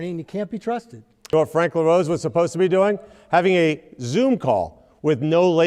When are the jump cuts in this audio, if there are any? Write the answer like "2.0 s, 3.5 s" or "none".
1.3 s